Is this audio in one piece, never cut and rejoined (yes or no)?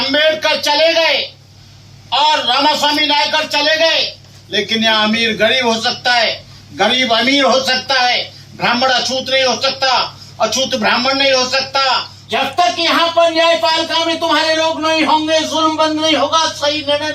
no